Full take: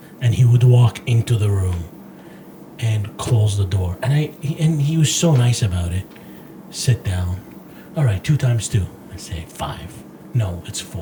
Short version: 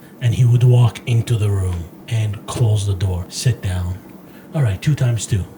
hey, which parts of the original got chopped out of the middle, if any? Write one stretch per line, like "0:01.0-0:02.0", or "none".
0:02.0-0:02.7
0:03.9-0:06.7